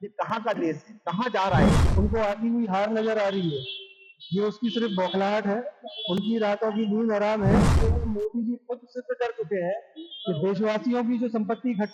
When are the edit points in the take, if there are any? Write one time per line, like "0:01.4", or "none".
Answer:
0:01.8
0:07.8